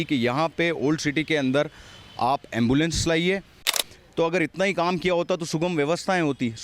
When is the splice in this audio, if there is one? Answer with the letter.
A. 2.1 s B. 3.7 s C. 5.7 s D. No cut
B